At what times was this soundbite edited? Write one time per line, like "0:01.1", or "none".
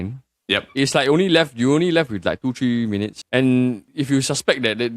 0:03.2
0:03.9